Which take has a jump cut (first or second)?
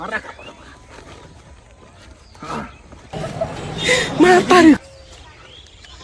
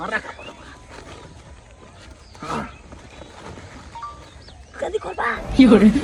first